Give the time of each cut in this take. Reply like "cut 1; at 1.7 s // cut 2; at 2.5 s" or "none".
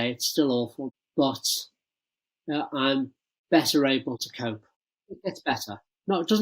cut 1; at 0.9 s // cut 2; at 4.6 s